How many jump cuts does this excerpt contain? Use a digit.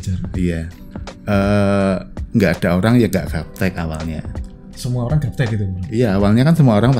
0